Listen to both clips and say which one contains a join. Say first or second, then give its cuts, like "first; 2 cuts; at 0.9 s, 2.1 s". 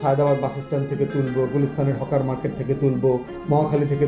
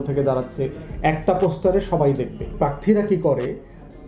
second; 1 cut; at 2.5 s